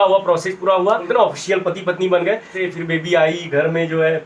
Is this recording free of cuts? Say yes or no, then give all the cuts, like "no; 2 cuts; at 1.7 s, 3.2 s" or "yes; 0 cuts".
no; 2 cuts; at 1.1 s, 2.5 s